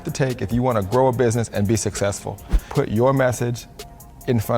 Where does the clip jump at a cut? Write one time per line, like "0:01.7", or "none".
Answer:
0:02.7

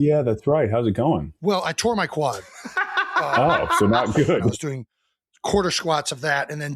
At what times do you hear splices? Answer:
0:01.3
0:04.5

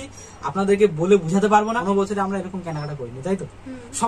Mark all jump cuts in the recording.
0:01.8

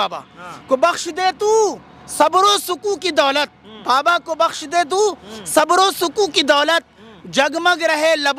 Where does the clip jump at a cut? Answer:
none

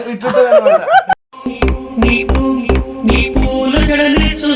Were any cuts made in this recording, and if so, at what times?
0:01.1

